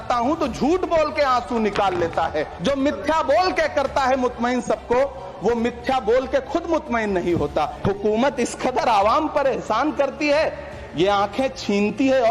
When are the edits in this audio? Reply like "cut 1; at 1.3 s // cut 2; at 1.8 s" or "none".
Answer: cut 1; at 2.5 s // cut 2; at 7.7 s